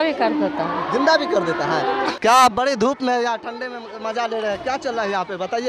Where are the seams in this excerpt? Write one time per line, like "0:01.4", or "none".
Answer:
none

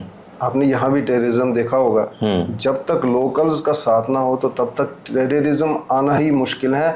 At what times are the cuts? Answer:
none

